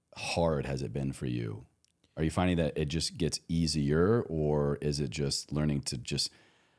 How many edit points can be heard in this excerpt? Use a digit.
0